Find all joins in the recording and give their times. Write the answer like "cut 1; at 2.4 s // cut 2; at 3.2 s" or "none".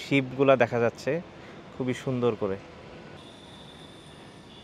cut 1; at 3.2 s